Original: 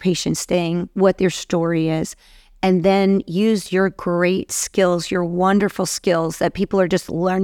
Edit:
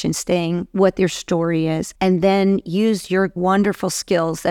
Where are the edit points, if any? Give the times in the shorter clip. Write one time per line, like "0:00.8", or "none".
0:01.9
0:03.3